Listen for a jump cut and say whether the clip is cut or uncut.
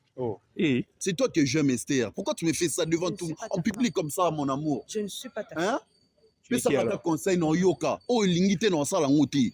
cut